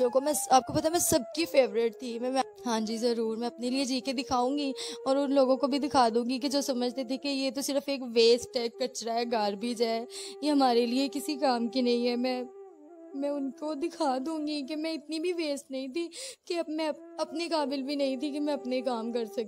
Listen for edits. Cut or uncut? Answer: cut